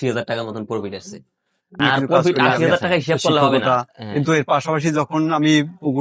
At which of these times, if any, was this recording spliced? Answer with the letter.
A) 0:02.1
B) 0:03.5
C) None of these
B